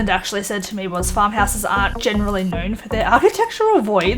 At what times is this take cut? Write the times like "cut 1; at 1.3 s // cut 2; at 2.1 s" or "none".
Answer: cut 1; at 2.0 s